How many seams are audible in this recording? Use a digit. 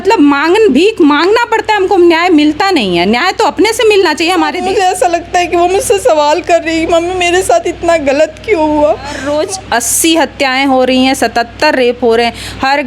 2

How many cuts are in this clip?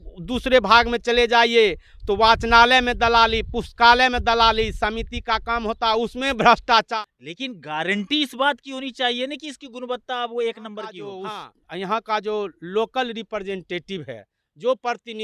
2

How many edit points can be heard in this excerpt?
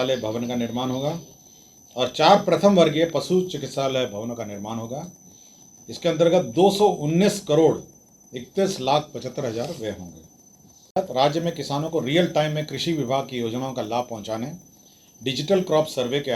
0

